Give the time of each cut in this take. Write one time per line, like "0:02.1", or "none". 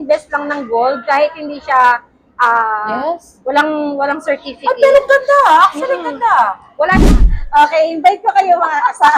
0:07.1